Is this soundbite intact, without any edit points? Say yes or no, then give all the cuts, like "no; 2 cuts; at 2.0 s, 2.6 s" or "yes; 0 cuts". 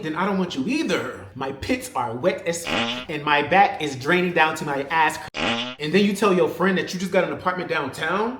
no; 3 cuts; at 1.2 s, 2.7 s, 5.7 s